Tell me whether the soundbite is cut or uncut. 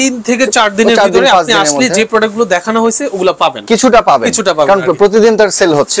uncut